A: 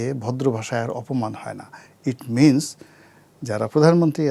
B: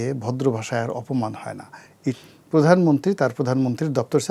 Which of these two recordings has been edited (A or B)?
B